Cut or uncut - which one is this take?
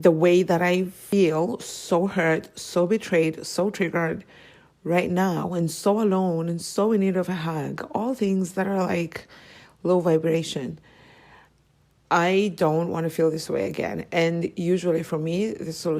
cut